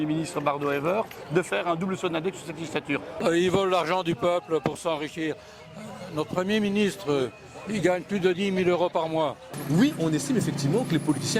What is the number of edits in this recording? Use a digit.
2